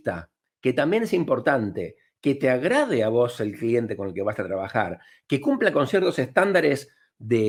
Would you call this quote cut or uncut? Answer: uncut